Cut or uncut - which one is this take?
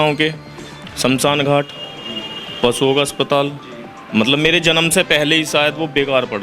uncut